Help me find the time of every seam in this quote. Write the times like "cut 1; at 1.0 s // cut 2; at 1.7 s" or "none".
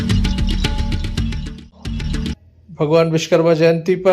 cut 1; at 2.3 s